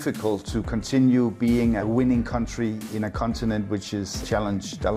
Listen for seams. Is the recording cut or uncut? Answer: cut